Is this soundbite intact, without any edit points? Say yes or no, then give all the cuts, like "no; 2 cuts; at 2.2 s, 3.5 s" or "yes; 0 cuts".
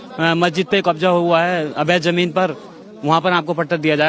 yes; 0 cuts